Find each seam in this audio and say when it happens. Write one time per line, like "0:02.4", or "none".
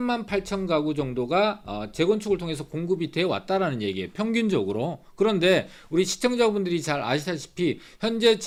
none

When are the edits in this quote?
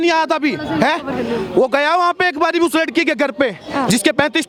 none

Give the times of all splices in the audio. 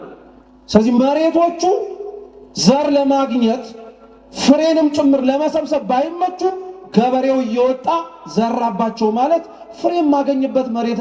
none

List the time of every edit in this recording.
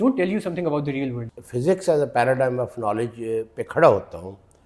0:01.2

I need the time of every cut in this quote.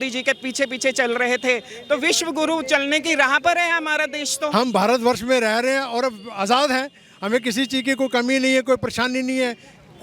0:04.5

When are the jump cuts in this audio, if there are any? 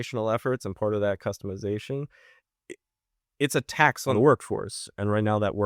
0:04.1

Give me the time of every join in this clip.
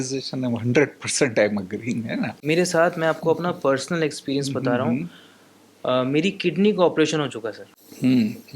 0:02.3

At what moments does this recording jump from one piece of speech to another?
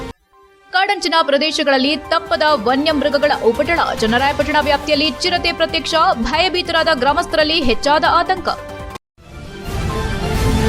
0:08.9

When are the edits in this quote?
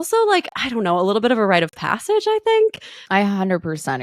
0:02.9

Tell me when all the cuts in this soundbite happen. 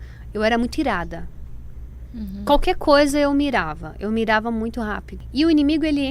0:05.1

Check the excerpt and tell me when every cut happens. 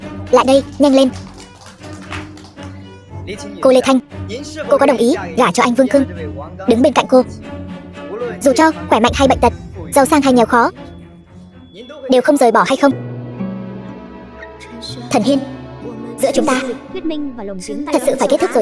0:12.9

